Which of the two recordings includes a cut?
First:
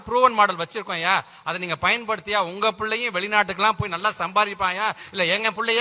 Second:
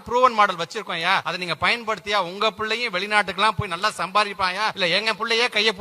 second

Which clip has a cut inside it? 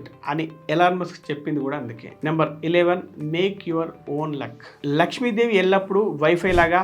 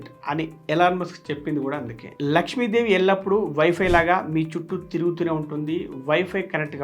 second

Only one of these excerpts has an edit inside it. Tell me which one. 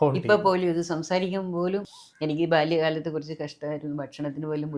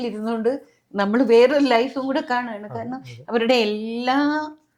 first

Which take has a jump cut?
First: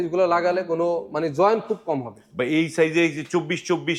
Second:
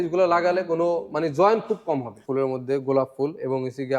second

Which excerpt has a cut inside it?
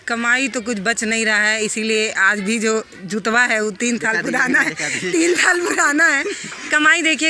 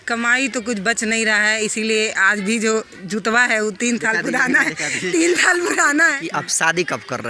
second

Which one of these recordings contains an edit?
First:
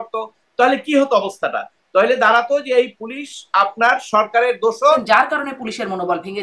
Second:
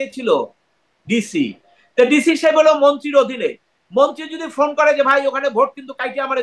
first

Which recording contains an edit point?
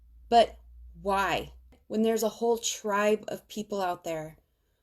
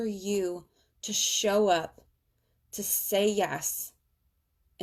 first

